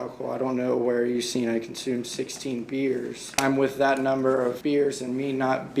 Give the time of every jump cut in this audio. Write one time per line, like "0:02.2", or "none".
0:03.3
0:04.6

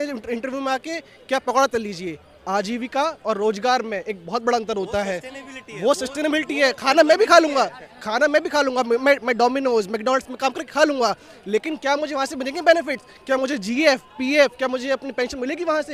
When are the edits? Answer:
none

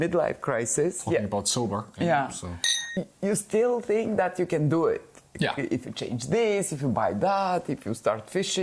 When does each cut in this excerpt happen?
0:02.8

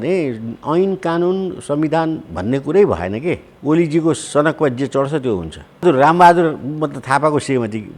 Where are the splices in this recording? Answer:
0:03.5
0:05.8

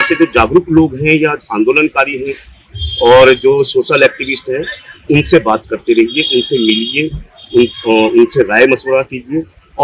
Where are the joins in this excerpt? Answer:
none

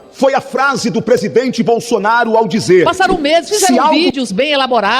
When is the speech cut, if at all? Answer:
0:02.9

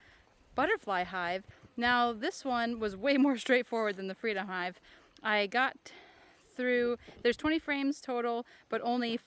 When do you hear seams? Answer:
none

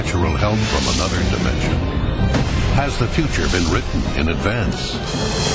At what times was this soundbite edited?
0:03.3

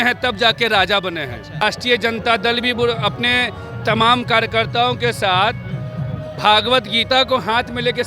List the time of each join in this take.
0:01.6

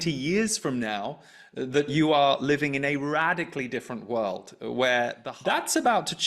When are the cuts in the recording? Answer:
0:05.2

